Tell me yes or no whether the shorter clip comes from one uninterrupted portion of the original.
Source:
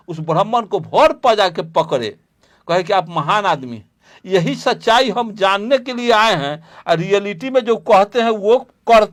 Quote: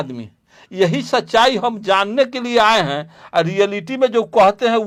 yes